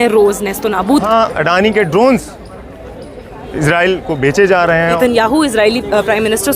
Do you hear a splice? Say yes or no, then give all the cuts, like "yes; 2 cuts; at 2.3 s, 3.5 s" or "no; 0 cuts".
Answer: yes; 2 cuts; at 1.1 s, 5.0 s